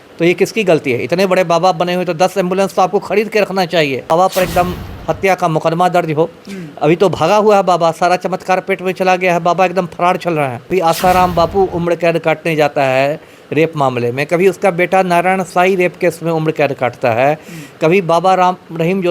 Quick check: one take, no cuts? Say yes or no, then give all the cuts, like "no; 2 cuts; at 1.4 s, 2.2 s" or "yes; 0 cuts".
no; 2 cuts; at 4.1 s, 10.7 s